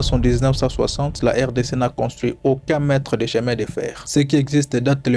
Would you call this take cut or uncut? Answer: uncut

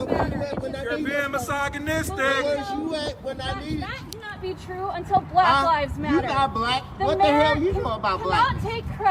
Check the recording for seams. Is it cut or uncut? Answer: uncut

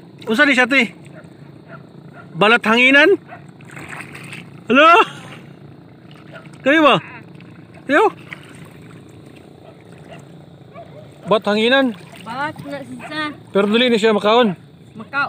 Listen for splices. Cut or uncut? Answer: uncut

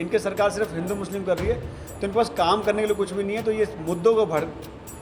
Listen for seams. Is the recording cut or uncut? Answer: uncut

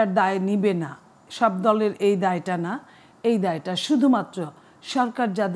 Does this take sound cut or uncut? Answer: uncut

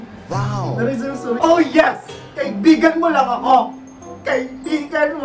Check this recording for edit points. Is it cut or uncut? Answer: cut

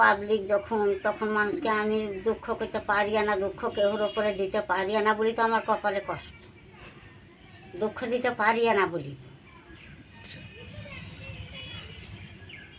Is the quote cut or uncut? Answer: uncut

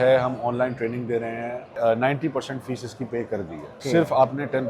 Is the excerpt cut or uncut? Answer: cut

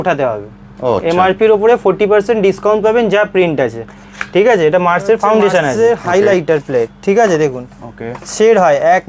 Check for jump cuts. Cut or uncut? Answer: cut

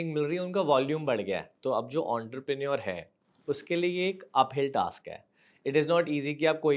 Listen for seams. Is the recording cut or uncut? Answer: cut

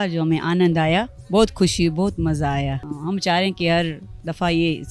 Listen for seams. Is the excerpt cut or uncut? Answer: cut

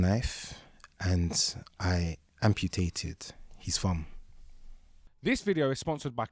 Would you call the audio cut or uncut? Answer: uncut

